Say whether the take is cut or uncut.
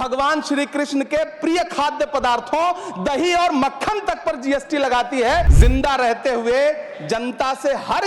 cut